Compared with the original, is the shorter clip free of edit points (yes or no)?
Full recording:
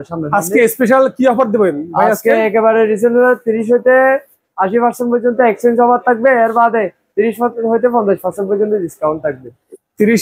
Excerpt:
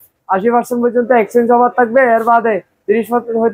yes